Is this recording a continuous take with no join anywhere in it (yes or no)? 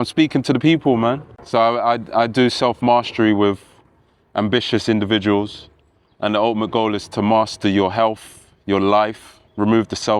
no